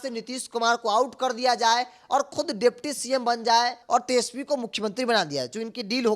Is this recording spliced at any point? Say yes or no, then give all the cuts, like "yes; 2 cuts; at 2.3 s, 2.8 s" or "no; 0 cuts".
yes; 1 cut; at 3.8 s